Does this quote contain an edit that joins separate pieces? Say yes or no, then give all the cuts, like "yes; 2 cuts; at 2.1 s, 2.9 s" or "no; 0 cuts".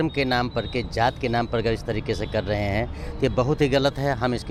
no; 0 cuts